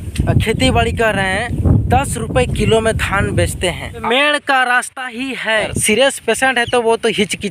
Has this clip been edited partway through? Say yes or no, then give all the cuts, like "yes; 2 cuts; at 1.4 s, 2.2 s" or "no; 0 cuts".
yes; 3 cuts; at 1.6 s, 4.0 s, 5.7 s